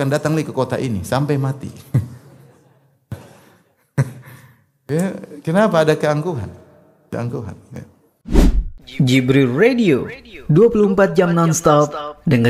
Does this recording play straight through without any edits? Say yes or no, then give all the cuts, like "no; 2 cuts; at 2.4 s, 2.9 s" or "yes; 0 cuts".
no; 1 cut; at 8.2 s